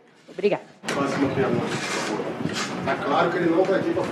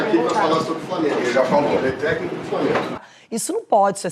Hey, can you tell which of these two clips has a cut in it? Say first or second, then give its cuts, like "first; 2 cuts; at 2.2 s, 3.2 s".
second; 1 cut; at 3.0 s